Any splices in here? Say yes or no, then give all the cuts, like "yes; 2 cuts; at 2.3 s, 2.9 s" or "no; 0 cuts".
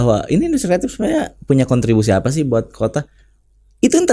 no; 0 cuts